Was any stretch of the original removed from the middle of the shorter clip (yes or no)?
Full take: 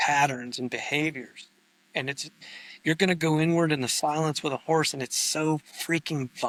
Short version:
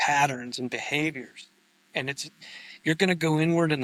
no